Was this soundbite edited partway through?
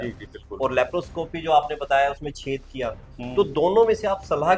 no; 0 cuts

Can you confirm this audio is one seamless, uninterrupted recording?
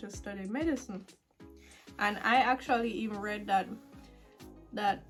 yes; 0 cuts

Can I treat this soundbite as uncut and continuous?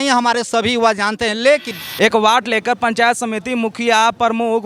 no; 1 cut; at 1.8 s

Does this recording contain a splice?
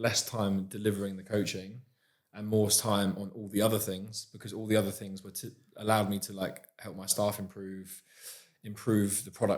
no; 0 cuts

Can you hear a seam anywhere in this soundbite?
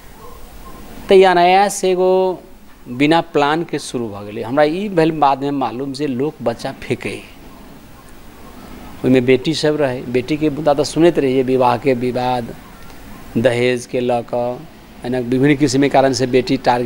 no; 0 cuts

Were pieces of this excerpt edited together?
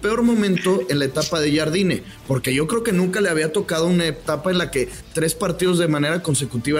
no; 0 cuts

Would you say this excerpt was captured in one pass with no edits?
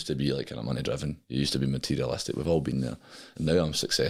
yes; 0 cuts

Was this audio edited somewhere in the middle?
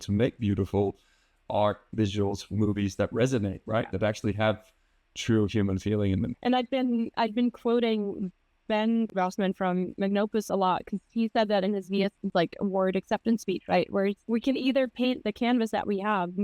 yes; 3 cuts; at 9.1 s, 12.2 s, 14.2 s

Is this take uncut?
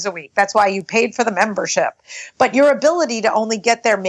yes; 0 cuts

